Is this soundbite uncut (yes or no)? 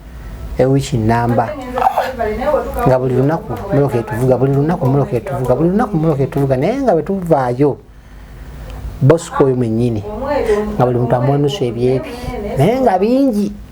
yes